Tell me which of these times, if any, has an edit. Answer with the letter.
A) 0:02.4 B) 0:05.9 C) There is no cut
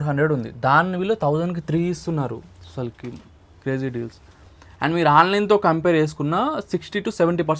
C